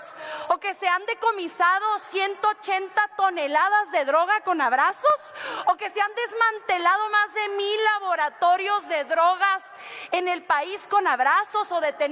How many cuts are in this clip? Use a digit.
0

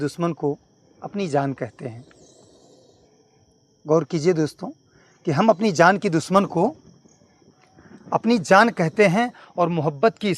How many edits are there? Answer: 0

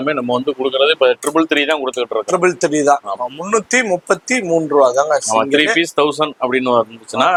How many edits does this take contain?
0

